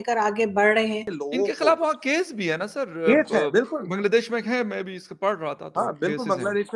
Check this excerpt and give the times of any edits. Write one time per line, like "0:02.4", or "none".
0:01.2

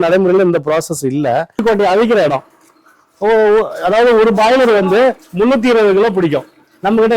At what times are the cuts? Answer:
0:01.6

